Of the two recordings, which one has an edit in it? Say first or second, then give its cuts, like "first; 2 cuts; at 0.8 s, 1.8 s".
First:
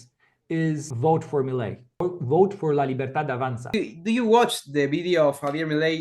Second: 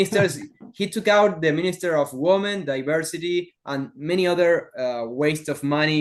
first; 3 cuts; at 0.9 s, 2.0 s, 3.7 s